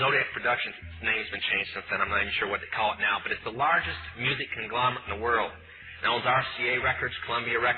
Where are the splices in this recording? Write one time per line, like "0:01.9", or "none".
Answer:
none

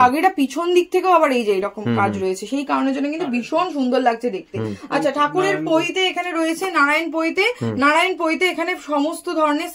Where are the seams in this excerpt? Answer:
none

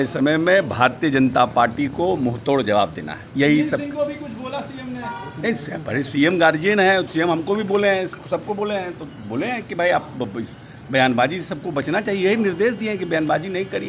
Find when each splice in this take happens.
none

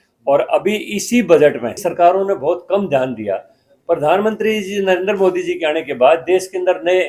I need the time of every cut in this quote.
0:01.8

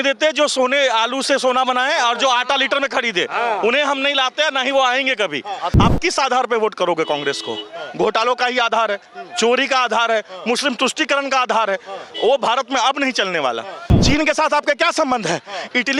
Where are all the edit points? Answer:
0:05.7
0:13.9

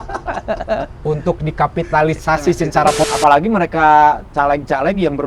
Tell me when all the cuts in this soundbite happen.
0:03.0

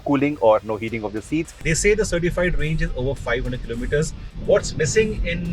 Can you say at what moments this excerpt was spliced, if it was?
0:01.7
0:04.3

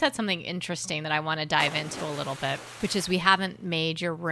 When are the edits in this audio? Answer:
none

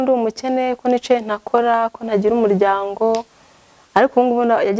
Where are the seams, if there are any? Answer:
none

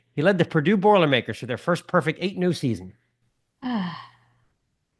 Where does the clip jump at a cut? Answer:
none

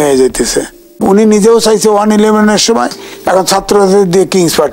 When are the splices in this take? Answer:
0:01.0

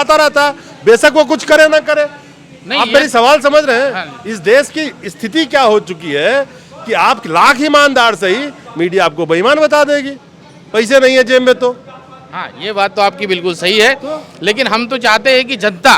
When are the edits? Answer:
none

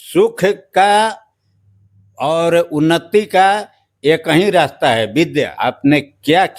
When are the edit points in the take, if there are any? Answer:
0:05.5

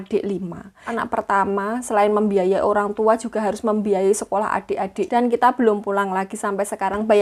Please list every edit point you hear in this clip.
0:01.0
0:05.1

